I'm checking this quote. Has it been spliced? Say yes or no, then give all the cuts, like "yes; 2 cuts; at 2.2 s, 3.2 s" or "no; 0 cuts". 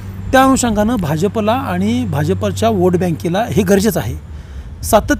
no; 0 cuts